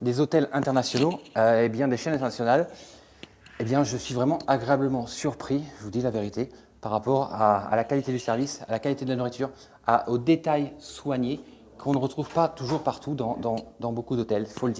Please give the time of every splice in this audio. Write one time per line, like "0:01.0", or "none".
none